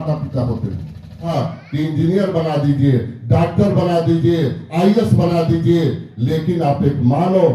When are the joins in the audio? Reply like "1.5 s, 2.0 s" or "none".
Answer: 1.3 s

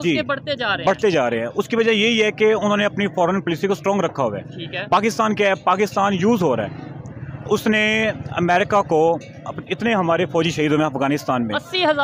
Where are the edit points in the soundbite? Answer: none

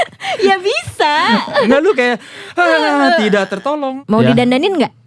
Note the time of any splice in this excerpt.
3.9 s

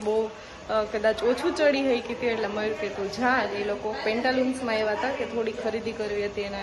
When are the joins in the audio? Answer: none

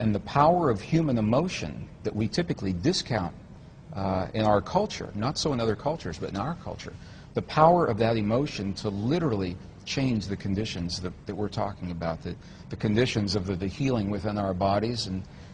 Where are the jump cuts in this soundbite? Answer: 11.8 s

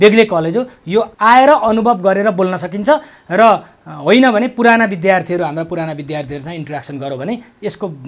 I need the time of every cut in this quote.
1.1 s

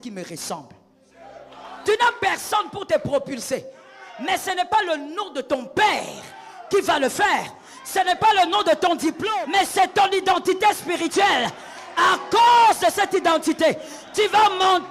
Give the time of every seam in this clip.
1.8 s, 9.2 s

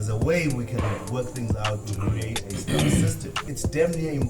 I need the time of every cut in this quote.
3.4 s

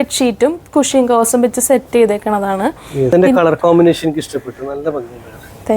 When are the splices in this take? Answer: 3.1 s

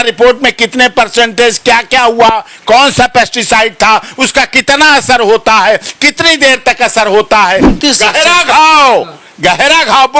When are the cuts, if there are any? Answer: 7.7 s

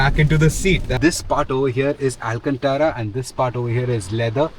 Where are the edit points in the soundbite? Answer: 0.9 s

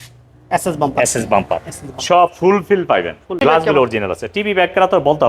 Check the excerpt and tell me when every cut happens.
3.4 s

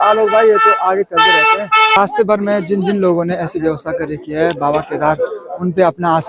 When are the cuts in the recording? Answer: 2.0 s

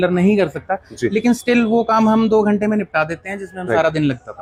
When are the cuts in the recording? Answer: none

